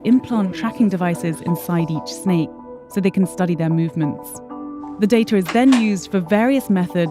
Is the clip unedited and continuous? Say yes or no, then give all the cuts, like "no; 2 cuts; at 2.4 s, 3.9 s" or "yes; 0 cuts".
yes; 0 cuts